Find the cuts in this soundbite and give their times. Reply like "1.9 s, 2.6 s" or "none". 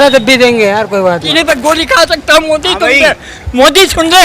1.3 s